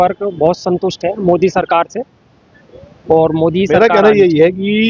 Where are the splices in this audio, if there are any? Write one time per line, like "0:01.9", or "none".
0:03.7